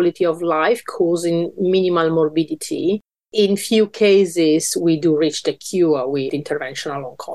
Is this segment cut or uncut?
cut